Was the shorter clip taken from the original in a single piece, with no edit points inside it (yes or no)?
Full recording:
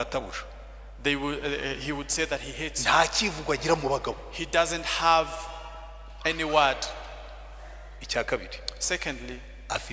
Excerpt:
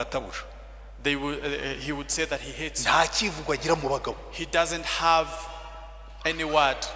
yes